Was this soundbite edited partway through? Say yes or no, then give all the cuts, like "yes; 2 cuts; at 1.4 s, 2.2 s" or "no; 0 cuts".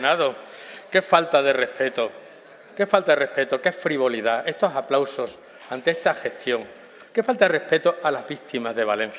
no; 0 cuts